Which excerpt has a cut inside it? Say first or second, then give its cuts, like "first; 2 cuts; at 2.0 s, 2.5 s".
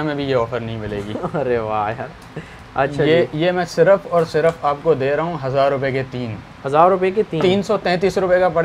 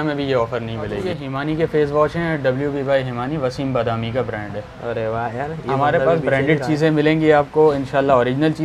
second; 1 cut; at 1.1 s